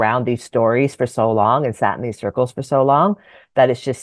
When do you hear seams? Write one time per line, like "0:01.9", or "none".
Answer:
none